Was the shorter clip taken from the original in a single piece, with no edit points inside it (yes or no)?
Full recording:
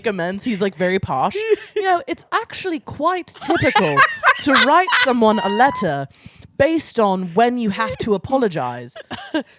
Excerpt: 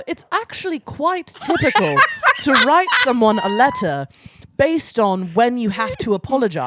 yes